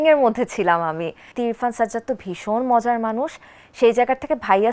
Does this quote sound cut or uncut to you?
cut